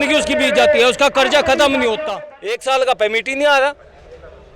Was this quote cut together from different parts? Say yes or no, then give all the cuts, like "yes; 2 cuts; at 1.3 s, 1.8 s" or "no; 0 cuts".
yes; 1 cut; at 2.1 s